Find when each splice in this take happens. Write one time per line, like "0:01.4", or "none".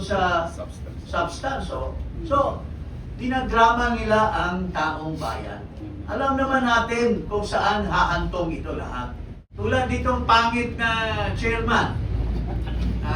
0:09.4